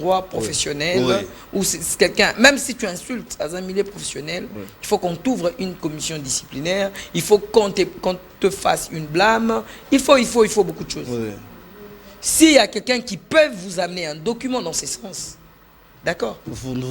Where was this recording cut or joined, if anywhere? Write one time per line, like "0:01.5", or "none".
none